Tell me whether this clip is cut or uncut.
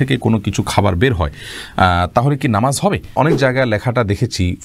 cut